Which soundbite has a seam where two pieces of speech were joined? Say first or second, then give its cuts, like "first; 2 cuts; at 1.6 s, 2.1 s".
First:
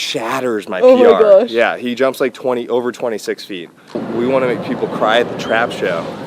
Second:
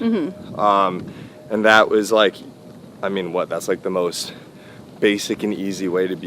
first; 1 cut; at 4.0 s